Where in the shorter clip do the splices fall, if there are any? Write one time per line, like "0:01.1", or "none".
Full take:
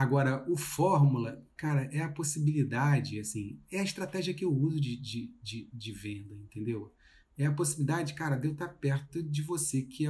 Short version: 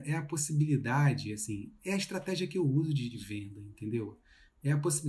0:03.2